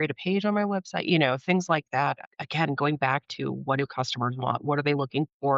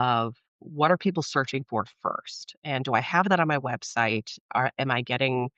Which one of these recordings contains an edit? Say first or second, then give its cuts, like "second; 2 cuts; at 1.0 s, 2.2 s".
first; 1 cut; at 2.2 s